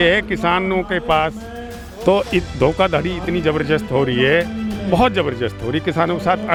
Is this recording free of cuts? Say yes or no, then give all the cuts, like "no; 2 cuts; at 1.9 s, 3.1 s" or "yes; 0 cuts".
yes; 0 cuts